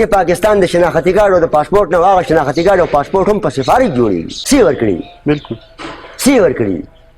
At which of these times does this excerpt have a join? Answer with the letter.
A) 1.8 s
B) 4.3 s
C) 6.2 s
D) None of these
B